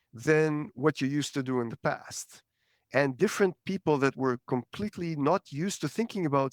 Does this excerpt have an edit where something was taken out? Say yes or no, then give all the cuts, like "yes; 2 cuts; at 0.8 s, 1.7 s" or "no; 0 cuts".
no; 0 cuts